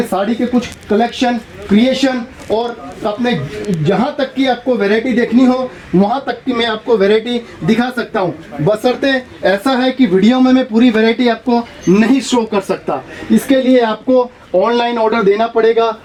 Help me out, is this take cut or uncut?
uncut